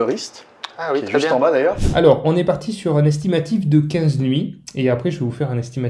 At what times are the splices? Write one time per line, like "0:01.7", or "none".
0:01.8